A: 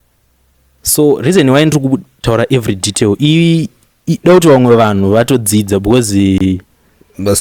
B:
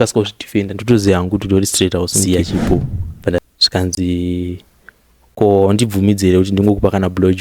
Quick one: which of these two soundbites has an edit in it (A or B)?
B